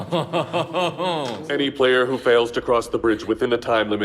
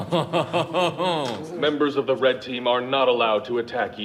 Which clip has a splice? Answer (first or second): first